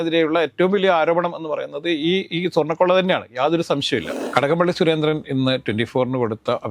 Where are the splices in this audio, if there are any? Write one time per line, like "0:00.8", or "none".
0:04.1